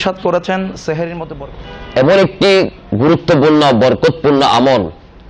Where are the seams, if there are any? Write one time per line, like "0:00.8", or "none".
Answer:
0:01.2

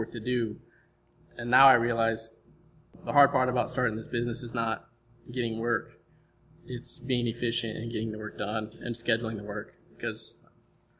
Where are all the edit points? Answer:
0:02.9

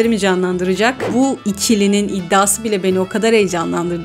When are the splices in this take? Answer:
0:01.0

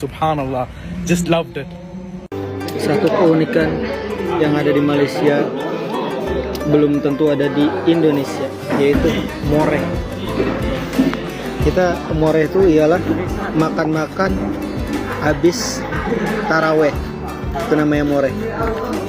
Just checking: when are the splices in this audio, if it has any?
0:02.3

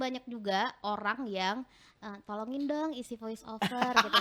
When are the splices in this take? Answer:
none

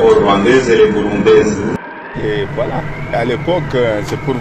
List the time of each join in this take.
0:02.0

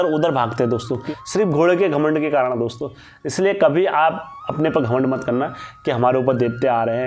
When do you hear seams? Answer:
0:01.0

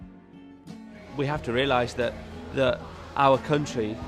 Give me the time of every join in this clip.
0:01.0

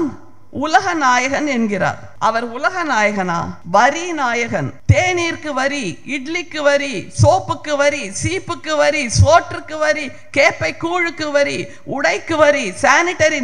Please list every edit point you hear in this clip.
0:02.1
0:03.5
0:04.8

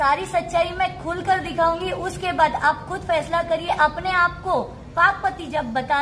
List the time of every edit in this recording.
0:03.6

